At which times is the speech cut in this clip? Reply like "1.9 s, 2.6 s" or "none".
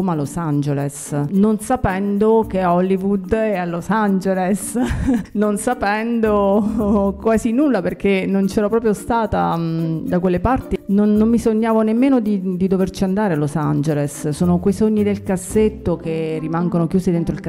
1.3 s, 5.3 s, 10.7 s